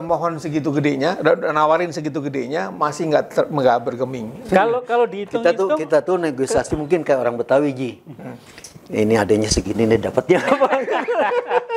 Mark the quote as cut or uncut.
uncut